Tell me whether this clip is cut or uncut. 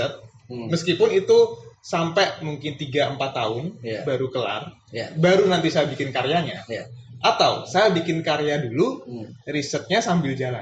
uncut